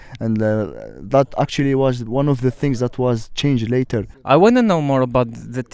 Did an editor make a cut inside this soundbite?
yes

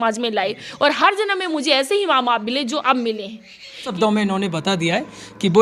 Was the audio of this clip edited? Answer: yes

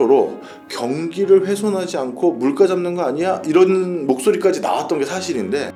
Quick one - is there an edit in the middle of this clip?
no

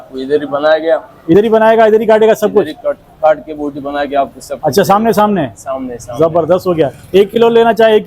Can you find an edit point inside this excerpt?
no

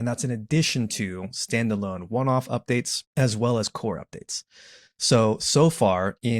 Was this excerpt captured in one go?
no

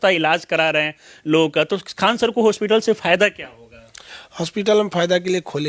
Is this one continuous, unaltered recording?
yes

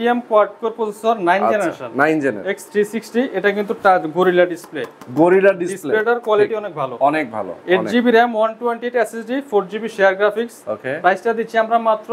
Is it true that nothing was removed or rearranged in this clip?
yes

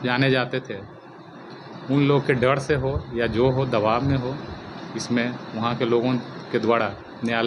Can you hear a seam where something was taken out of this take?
no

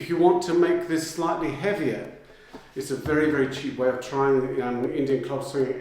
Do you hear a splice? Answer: yes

